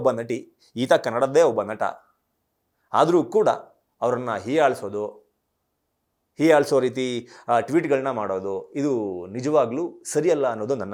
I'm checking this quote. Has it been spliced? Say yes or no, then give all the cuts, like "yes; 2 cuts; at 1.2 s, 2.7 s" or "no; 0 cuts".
no; 0 cuts